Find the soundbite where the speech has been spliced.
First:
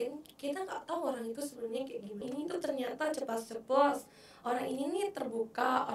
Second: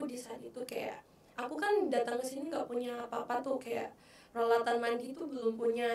first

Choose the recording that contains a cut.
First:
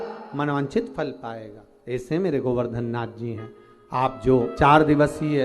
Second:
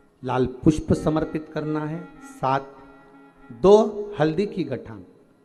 first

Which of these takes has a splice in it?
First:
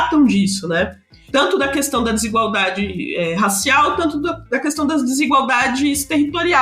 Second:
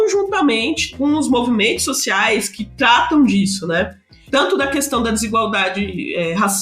second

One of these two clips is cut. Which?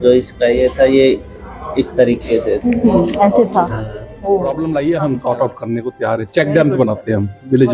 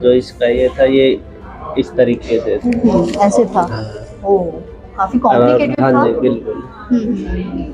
first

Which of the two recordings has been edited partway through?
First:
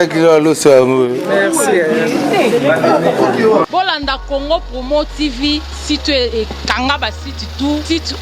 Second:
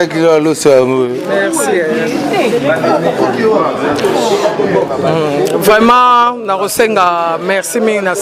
first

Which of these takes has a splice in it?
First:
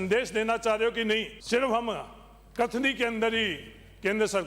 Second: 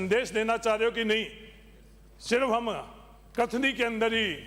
first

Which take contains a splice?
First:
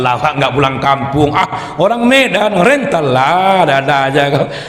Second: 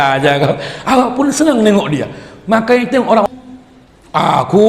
second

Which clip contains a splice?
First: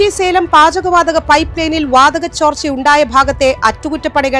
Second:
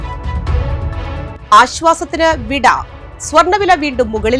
second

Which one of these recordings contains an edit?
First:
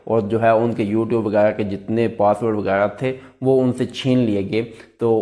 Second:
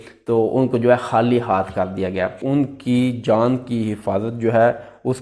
second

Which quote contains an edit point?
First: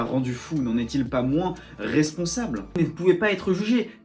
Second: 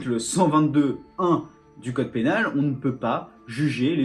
first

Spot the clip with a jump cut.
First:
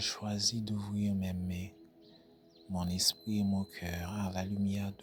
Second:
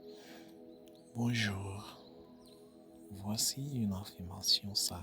second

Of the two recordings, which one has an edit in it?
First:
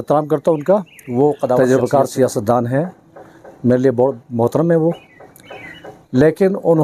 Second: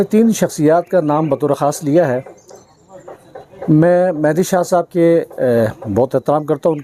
first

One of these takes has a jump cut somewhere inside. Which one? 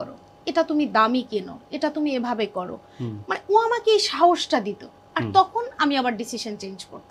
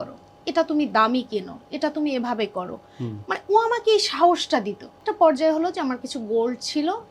second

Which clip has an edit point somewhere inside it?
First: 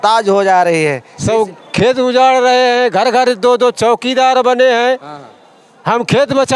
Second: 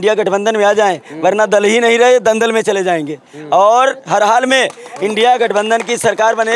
first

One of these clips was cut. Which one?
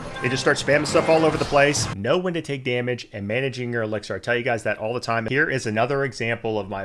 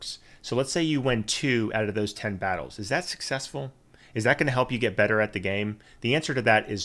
first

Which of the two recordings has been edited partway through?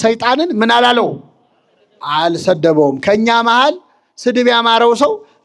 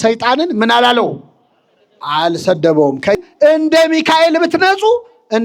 second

